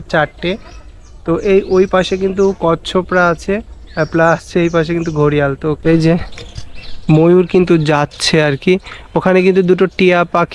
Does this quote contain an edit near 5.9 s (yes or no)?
yes